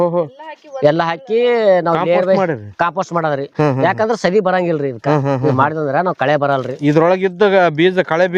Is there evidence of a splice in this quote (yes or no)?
no